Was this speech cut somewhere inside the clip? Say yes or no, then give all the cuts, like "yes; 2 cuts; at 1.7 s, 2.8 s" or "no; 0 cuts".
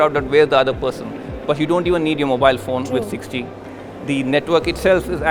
no; 0 cuts